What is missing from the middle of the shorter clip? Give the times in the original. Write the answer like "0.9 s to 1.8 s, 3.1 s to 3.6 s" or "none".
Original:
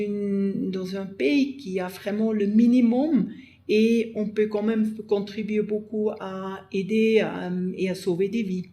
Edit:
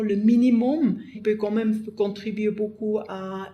3.4 s to 4.2 s